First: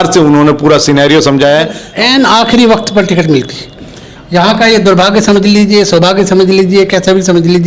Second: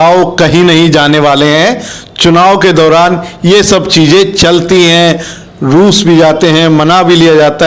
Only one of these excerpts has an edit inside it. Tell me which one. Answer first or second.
first